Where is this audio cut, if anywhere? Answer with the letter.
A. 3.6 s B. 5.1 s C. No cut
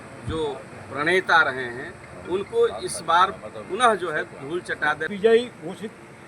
B